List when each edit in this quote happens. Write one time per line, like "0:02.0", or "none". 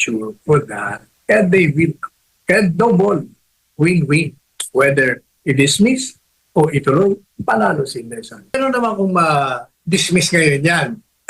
0:08.5